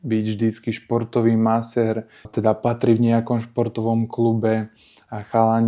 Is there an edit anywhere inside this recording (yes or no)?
yes